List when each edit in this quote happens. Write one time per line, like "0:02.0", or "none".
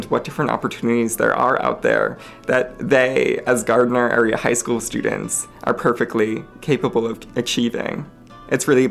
none

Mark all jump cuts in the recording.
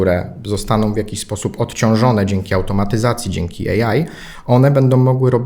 none

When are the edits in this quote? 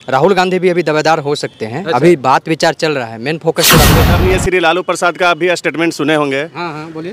0:04.0

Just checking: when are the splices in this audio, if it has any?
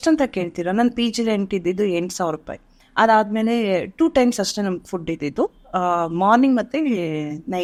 none

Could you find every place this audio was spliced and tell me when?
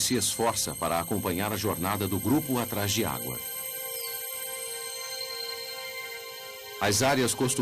0:04.2

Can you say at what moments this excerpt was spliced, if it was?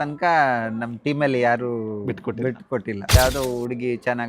0:03.1

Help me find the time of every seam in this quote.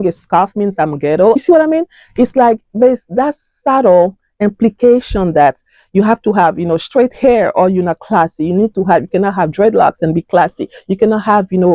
none

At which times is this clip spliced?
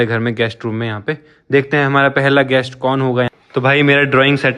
0:03.3

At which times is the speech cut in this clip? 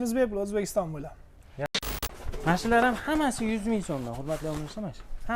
0:01.7

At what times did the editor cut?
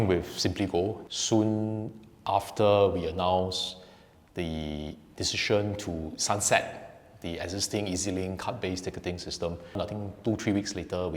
0:01.0
0:09.8

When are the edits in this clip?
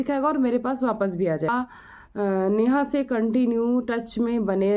0:01.5

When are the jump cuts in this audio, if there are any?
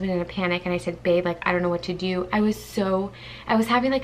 none

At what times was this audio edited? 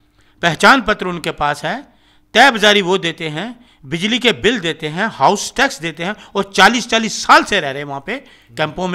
none

